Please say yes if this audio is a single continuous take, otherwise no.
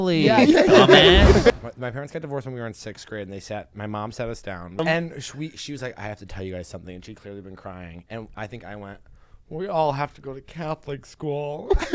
no